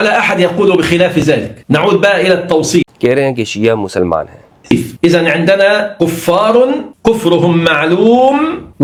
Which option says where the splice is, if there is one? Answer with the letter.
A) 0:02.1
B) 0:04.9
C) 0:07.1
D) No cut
D